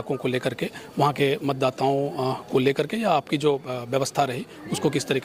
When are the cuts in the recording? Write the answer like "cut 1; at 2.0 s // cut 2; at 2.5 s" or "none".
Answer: none